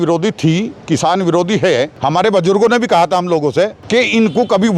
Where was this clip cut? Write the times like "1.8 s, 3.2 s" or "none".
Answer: 1.9 s, 3.8 s